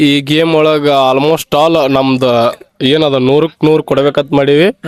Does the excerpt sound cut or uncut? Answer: uncut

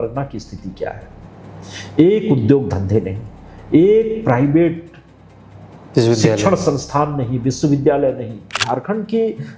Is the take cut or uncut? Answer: cut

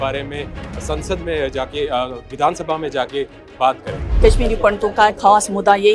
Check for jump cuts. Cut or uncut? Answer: cut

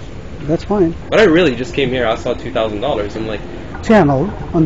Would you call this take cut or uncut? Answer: cut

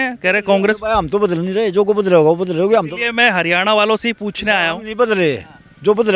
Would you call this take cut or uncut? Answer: uncut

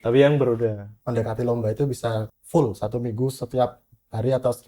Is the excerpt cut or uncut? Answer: cut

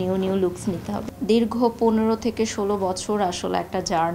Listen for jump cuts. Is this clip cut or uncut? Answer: cut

